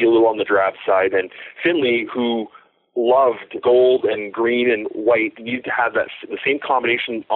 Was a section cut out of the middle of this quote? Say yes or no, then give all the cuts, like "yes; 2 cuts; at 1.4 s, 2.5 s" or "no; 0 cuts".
yes; 2 cuts; at 3.5 s, 5.4 s